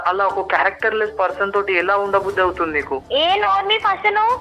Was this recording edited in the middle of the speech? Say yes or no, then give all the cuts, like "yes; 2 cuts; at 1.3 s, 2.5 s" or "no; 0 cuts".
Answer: yes; 1 cut; at 2.9 s